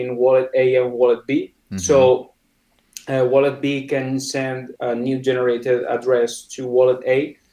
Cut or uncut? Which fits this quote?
cut